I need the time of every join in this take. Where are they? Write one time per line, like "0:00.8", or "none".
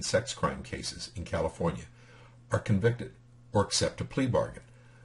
0:02.4